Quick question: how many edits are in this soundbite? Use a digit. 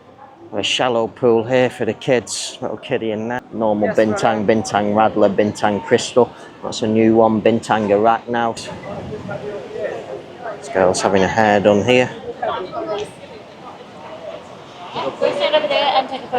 2